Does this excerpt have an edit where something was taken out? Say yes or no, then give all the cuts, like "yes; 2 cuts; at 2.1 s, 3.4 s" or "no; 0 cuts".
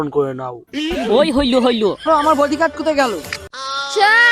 yes; 1 cut; at 2.1 s